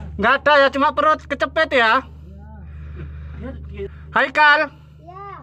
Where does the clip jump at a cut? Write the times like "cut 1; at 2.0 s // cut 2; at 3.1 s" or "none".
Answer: cut 1; at 3.9 s